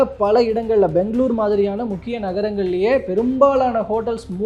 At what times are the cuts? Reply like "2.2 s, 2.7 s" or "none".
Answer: none

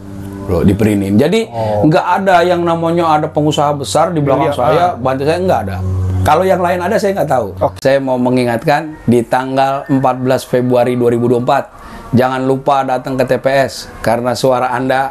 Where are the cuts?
7.9 s

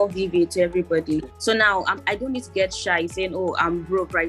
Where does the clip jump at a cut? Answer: 1.3 s

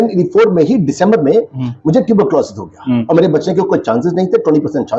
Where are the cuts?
none

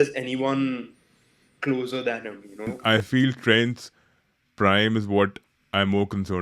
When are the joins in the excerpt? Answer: 2.7 s

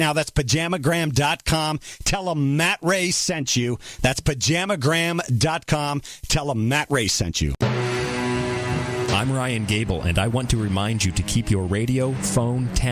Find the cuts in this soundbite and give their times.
7.6 s

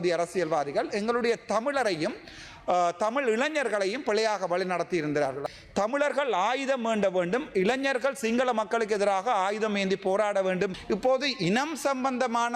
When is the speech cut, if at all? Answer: 5.4 s, 10.8 s

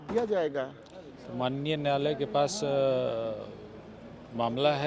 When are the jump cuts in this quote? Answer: 1.1 s

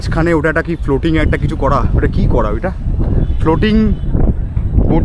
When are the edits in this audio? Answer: none

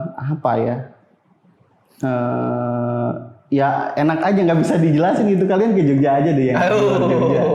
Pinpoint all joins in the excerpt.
none

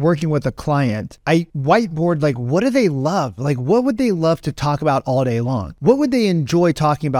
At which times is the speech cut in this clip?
none

